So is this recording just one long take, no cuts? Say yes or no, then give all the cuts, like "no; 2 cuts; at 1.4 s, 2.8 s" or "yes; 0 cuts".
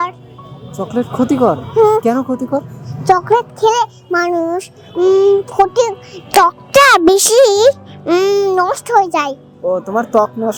yes; 0 cuts